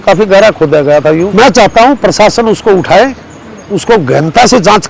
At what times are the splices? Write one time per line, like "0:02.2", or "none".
0:01.3